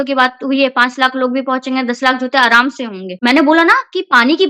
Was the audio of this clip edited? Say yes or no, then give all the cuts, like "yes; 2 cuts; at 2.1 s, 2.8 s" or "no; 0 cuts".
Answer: yes; 1 cut; at 3.1 s